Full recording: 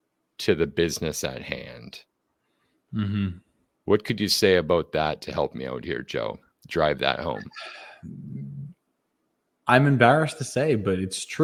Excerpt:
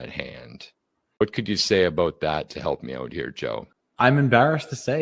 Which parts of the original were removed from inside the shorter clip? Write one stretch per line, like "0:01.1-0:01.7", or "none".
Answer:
0:02.5-0:03.9
0:06.5-0:09.5